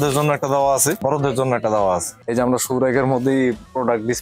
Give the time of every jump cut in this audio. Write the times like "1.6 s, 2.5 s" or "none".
1.0 s, 2.2 s